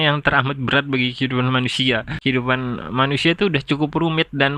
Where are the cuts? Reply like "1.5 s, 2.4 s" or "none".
2.2 s

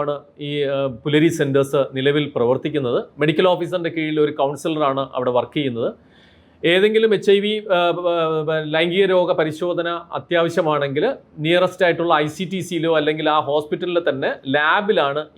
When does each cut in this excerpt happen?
none

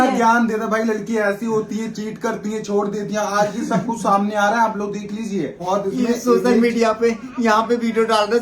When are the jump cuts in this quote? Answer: 5.6 s

